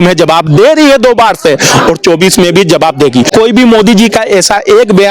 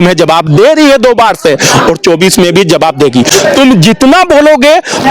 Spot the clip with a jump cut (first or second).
first